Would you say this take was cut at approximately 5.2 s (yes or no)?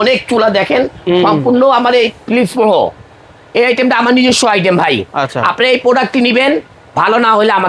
no